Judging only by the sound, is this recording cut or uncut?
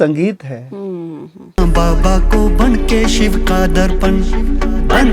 cut